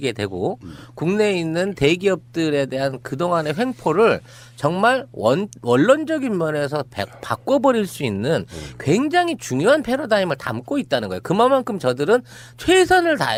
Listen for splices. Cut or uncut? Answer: uncut